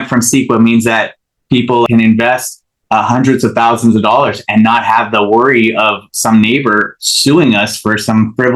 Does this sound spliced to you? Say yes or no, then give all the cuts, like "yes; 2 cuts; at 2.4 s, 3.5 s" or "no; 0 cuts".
yes; 1 cut; at 1.9 s